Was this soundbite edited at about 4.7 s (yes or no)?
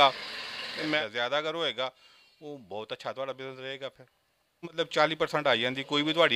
yes